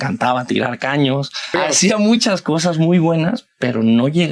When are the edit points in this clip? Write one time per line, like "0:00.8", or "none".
0:01.5